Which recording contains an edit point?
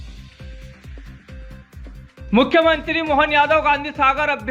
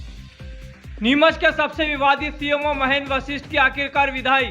second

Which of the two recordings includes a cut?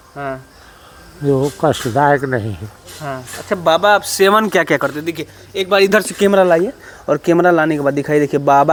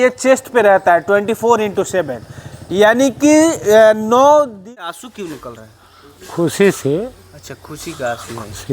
second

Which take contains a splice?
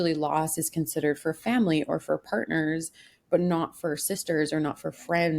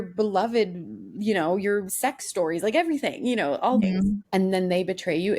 second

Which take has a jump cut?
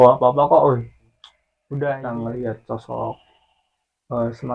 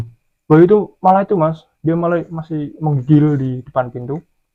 first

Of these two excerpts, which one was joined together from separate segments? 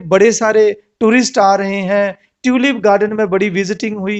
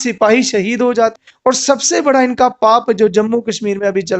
second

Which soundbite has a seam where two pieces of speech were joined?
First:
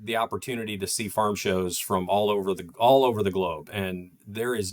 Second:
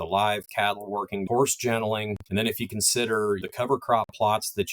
second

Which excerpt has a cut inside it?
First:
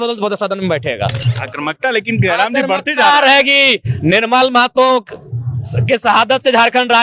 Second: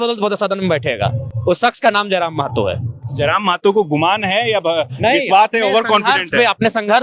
first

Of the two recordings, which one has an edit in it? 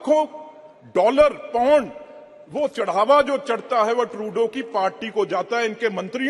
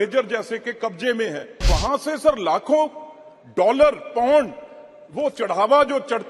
second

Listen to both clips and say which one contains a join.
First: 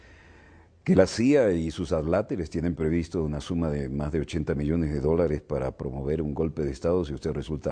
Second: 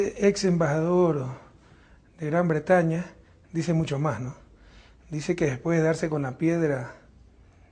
first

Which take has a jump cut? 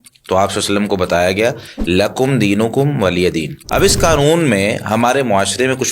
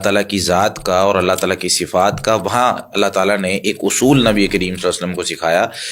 first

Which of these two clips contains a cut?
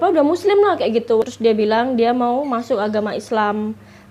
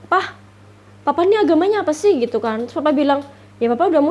first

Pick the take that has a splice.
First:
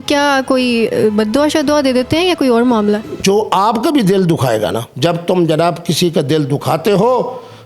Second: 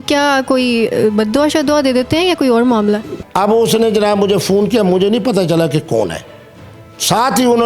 second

